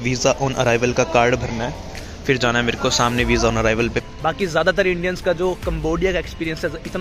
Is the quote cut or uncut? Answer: cut